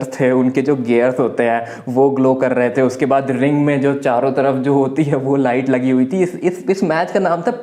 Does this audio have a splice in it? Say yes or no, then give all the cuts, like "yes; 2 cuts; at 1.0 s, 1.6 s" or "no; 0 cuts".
no; 0 cuts